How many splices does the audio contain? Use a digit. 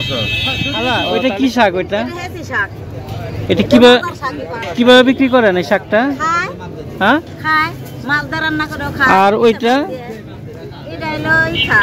1